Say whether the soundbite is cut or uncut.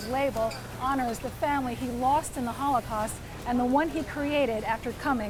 uncut